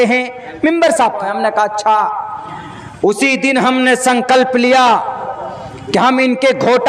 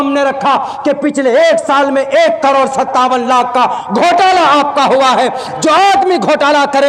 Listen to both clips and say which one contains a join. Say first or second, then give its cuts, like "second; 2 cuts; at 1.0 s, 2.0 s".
first; 1 cut; at 1.2 s